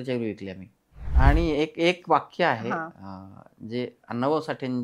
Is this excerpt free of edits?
no; 1 cut; at 1.1 s

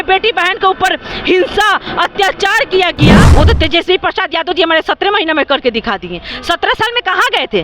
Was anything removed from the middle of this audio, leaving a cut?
yes; 1 cut; at 3.2 s

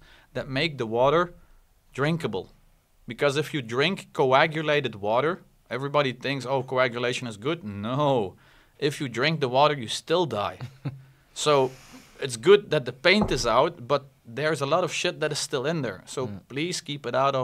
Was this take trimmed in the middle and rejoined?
no; 0 cuts

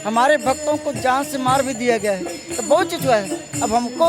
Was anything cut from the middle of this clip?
no; 0 cuts

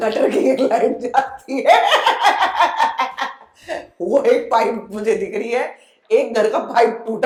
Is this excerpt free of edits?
yes; 0 cuts

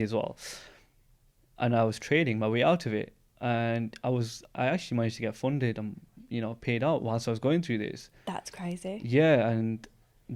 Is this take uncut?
yes; 0 cuts

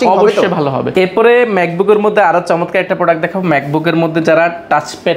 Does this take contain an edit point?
no; 0 cuts

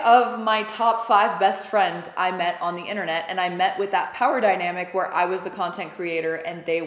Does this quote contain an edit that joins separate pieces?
no; 0 cuts

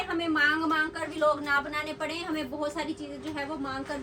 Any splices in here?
no; 0 cuts

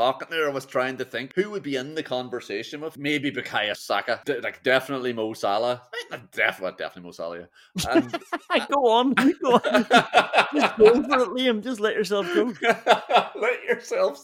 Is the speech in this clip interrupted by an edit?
yes; 3 cuts; at 1.2 s, 3.0 s, 3.8 s

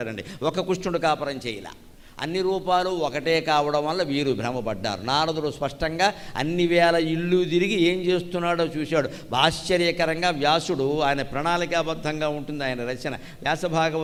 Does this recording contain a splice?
no; 0 cuts

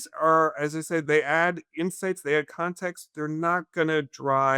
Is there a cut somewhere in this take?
yes; 1 cut; at 1.0 s

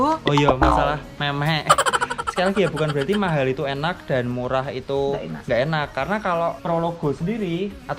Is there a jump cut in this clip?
yes; 1 cut; at 2.2 s

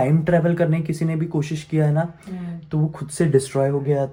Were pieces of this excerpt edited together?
no; 0 cuts

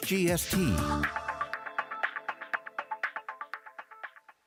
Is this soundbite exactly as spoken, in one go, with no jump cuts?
yes; 0 cuts

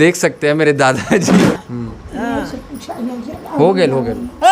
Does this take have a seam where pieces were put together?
yes; 1 cut; at 1.6 s

